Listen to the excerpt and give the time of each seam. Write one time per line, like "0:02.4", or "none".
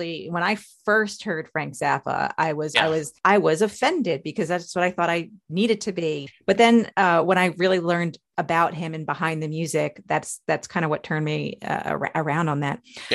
0:02.7
0:06.3